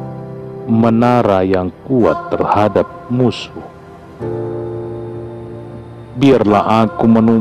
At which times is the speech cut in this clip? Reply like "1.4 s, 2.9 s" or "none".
4.2 s, 6.0 s